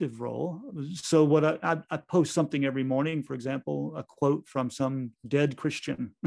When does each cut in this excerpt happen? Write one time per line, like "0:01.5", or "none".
0:05.1